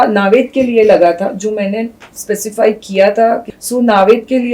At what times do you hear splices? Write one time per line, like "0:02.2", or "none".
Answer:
0:03.5